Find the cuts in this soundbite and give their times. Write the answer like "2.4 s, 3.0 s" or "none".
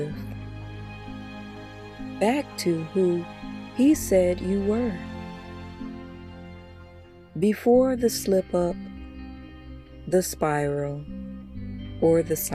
none